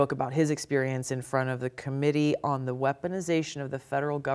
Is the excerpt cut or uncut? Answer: uncut